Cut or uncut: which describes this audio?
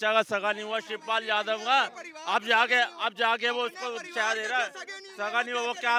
uncut